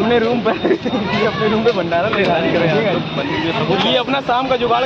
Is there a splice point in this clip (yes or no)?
no